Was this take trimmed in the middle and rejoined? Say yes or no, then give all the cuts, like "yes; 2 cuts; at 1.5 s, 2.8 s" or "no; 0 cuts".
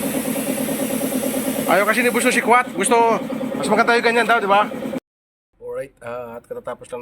yes; 1 cut; at 5.0 s